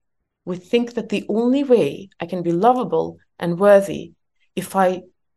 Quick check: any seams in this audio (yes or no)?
no